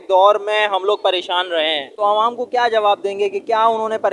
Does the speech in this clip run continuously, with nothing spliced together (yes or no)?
yes